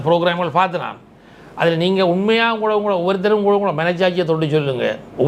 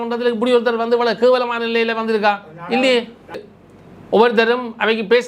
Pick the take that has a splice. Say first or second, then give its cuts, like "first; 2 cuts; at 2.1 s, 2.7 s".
second; 1 cut; at 3.4 s